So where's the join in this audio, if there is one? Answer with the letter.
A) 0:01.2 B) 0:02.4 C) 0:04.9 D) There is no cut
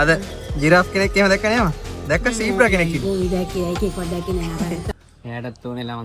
C